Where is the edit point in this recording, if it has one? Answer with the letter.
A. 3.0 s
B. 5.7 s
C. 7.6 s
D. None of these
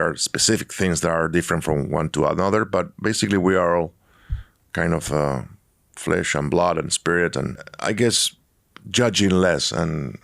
C